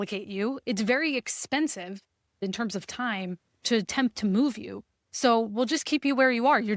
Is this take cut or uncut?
cut